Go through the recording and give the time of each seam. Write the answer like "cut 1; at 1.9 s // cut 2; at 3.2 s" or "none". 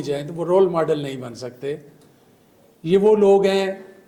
none